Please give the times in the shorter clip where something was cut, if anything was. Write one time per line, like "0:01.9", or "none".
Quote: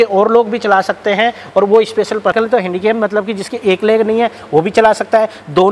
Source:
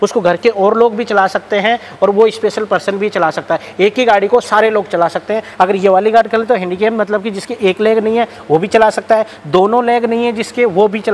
0:02.3